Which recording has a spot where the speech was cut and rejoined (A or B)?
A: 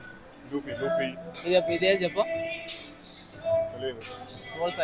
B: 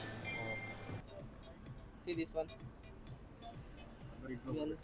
B